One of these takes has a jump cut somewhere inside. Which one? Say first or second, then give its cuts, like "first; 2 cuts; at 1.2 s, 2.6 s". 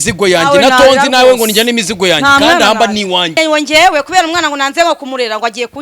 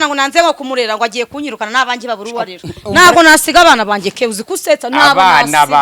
first; 1 cut; at 3.4 s